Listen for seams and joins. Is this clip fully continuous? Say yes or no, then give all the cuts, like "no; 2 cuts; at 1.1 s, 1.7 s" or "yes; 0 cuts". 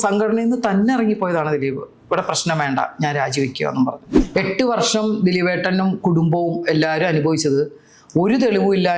no; 1 cut; at 4.1 s